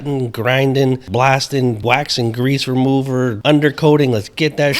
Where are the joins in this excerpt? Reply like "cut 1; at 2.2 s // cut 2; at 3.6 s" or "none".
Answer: cut 1; at 1.0 s // cut 2; at 1.8 s // cut 3; at 3.4 s